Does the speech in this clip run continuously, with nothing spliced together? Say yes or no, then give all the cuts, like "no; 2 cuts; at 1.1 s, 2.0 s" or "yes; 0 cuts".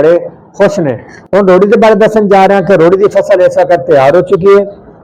no; 1 cut; at 1.1 s